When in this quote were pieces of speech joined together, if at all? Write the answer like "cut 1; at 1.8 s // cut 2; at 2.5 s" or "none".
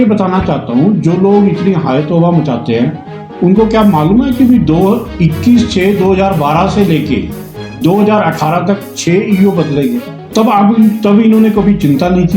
cut 1; at 10.1 s